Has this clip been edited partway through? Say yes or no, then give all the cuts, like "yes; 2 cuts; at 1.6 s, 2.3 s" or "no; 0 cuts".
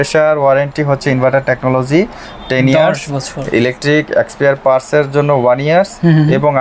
no; 0 cuts